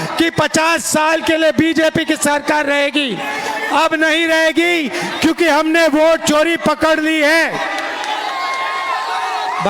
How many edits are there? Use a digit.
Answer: 0